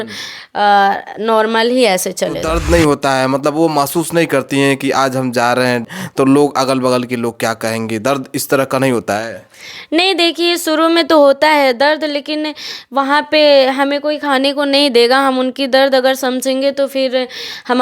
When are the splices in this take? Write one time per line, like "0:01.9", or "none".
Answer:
0:02.5
0:05.9